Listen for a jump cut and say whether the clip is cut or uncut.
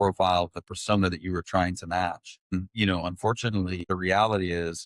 cut